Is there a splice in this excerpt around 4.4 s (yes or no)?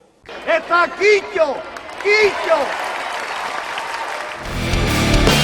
yes